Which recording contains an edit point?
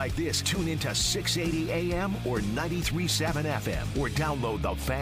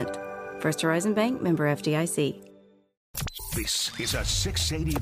second; 1 cut; at 3.0 s

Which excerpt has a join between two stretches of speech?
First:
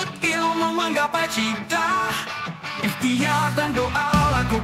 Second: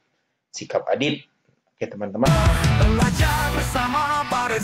second; 1 cut; at 2.3 s

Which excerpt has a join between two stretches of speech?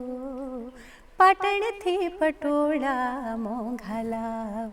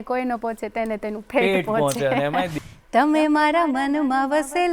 second; 1 cut; at 2.6 s

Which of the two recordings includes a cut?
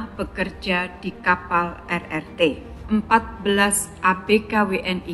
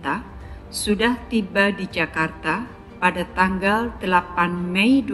first; 1 cut; at 2.7 s

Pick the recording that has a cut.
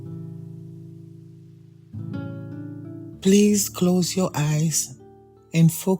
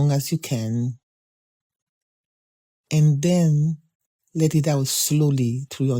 first; 1 cut; at 3.1 s

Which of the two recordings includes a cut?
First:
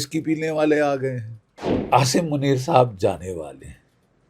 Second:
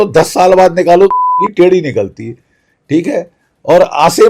first; 1 cut; at 1.8 s

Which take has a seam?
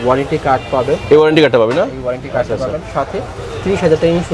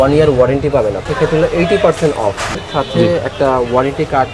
second; 2 cuts; at 1.0 s, 2.5 s

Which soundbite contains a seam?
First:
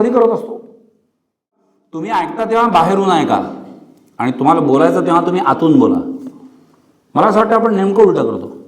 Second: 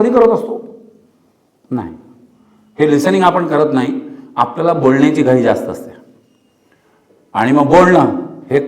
first; 1 cut; at 1.6 s

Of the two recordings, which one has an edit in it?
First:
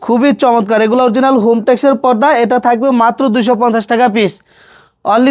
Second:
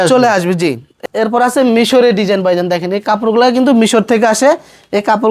second; 1 cut; at 0.9 s

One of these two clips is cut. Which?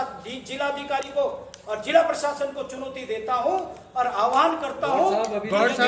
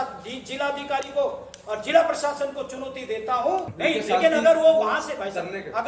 second; 1 cut; at 3.7 s

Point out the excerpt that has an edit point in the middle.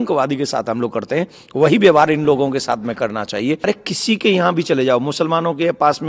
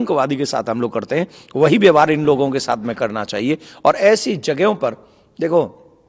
first; 1 cut; at 3.6 s

